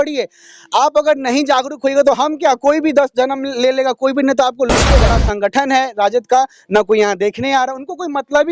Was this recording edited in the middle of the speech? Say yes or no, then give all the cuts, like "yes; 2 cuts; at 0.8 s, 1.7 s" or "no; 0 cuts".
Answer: yes; 1 cut; at 5.0 s